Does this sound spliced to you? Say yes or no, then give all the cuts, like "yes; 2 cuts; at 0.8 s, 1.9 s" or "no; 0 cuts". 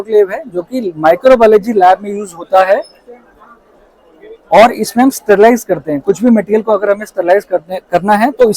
no; 0 cuts